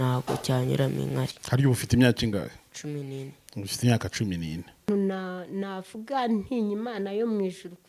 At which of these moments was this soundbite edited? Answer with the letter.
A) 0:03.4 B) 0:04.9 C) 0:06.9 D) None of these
B